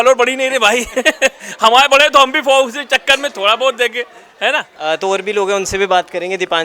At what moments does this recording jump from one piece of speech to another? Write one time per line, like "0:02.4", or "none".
none